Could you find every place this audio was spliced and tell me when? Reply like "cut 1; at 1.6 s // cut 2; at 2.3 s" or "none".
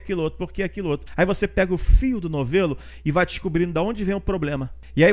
cut 1; at 1.1 s

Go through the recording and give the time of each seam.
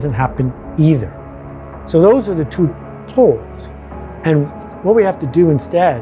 none

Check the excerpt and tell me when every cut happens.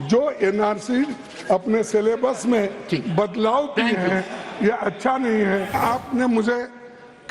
cut 1; at 5.7 s

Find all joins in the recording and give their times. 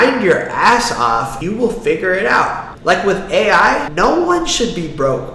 cut 1; at 2.7 s

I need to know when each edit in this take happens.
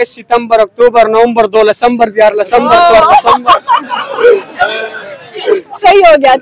none

